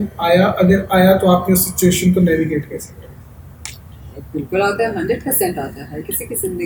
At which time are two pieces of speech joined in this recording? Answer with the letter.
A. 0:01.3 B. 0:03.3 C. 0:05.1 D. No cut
D